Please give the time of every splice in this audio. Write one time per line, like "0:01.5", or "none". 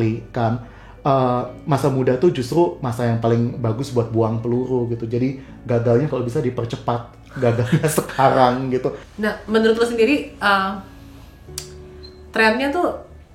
0:09.1